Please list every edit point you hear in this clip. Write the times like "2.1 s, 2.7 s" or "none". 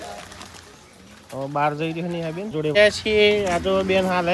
2.7 s